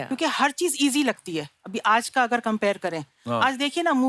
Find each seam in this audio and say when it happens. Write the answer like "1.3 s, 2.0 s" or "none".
none